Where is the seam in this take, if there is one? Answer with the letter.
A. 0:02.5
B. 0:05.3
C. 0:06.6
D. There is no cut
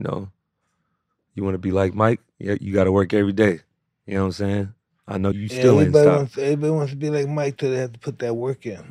B